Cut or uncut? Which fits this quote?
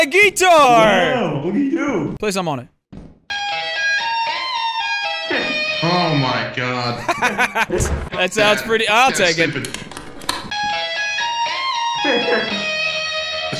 cut